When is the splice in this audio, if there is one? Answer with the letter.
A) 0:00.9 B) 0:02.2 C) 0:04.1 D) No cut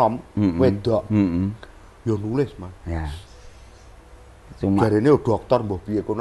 D